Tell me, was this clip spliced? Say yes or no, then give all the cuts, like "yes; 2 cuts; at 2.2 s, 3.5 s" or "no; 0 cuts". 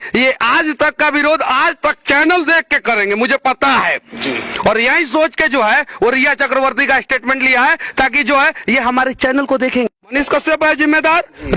yes; 1 cut; at 10.0 s